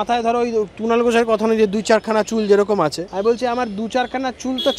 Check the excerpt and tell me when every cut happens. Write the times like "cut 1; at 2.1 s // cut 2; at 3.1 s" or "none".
cut 1; at 3.0 s

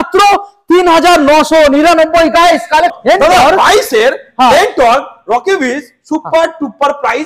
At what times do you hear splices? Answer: cut 1; at 2.9 s

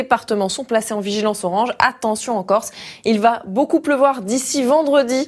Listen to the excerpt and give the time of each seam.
cut 1; at 1.0 s

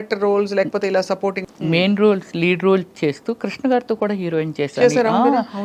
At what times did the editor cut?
cut 1; at 1.4 s

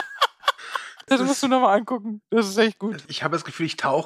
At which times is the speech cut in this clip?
cut 1; at 0.9 s // cut 2; at 3.0 s

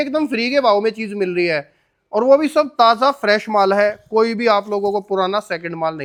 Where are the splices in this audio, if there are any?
none

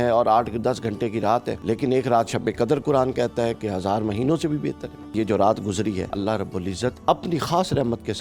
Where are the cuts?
cut 1; at 1.6 s // cut 2; at 5.1 s // cut 3; at 6.5 s

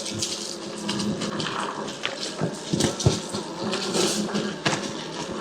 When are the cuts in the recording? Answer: cut 1; at 1.3 s

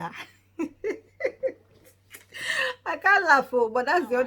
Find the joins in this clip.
none

